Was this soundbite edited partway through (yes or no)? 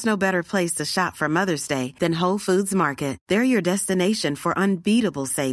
no